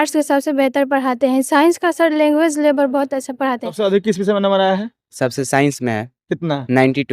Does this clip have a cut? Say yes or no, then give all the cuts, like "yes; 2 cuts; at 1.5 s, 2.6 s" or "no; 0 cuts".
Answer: yes; 1 cut; at 3.8 s